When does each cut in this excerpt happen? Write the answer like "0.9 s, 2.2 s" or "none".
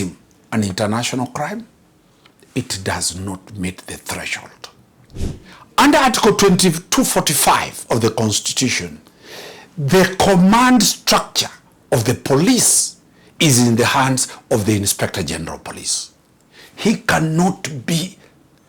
5.2 s